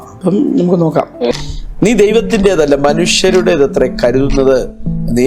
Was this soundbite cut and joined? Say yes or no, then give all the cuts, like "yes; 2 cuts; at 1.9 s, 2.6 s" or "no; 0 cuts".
yes; 1 cut; at 1.3 s